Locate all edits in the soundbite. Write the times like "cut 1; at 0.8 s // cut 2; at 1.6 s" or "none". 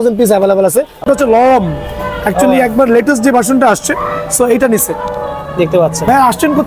cut 1; at 1.0 s